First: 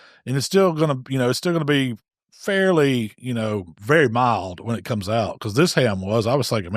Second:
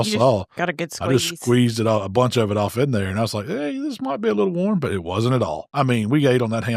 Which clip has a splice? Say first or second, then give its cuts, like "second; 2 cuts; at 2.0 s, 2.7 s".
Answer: second; 1 cut; at 5.6 s